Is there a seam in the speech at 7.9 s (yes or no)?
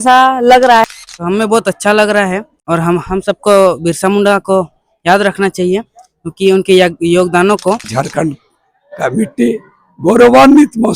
yes